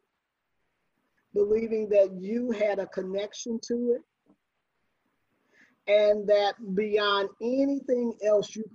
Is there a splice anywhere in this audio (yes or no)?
no